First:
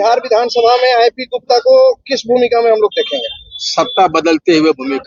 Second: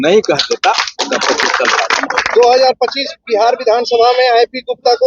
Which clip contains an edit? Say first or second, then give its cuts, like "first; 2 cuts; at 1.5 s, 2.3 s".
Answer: second; 1 cut; at 1.9 s